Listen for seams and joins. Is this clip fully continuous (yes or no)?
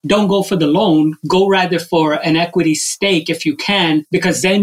yes